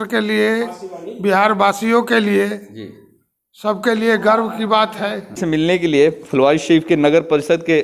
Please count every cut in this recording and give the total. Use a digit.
1